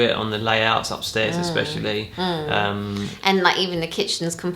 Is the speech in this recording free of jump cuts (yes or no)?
yes